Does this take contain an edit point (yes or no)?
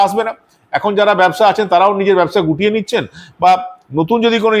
no